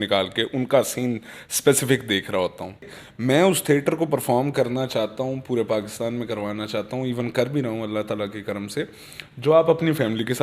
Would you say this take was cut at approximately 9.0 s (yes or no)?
no